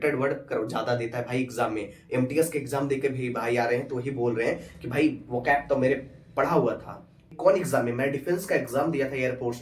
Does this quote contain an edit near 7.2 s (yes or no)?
yes